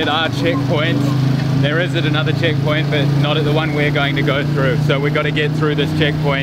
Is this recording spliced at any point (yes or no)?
no